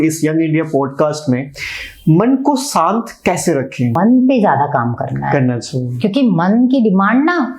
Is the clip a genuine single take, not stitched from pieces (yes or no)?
no